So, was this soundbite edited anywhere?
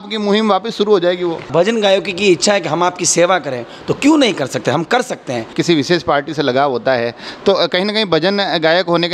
yes; 2 cuts; at 1.4 s, 5.5 s

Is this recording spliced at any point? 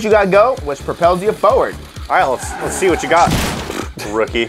yes; 1 cut; at 1.8 s

